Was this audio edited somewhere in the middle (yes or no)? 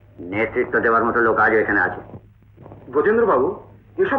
no